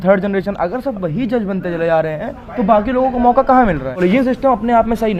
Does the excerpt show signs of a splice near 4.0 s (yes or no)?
yes